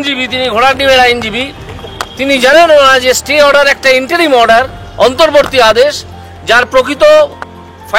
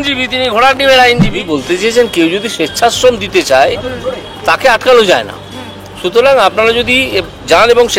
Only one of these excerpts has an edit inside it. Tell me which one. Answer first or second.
second